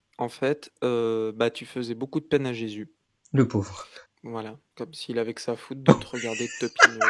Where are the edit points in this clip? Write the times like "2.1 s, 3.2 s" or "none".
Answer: none